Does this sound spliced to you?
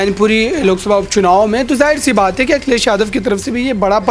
no; 0 cuts

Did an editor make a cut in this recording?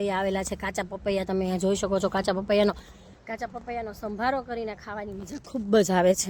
no; 0 cuts

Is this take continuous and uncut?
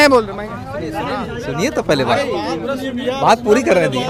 yes; 0 cuts

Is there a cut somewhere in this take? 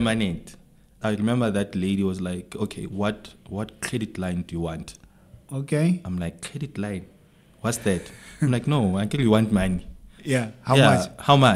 yes; 1 cut; at 0.9 s

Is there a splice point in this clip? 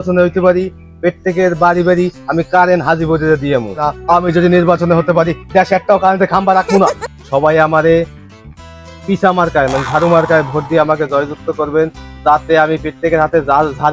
yes; 2 cuts; at 3.8 s, 7.1 s

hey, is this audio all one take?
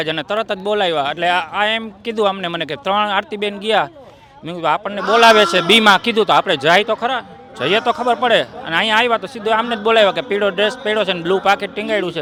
yes; 0 cuts

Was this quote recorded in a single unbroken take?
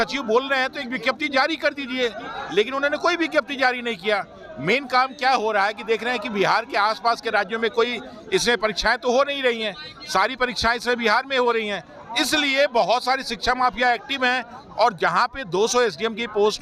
yes; 0 cuts

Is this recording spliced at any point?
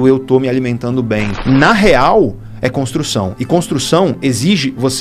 yes; 1 cut; at 1.3 s

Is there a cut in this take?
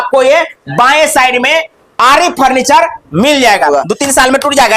yes; 2 cuts; at 1.8 s, 3.7 s

